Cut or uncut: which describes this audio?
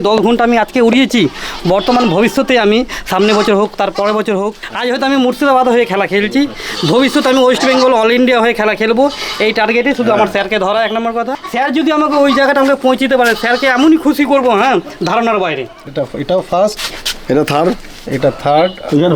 cut